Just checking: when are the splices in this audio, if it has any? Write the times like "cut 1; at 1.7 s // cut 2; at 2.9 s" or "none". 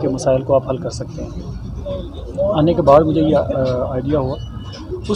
none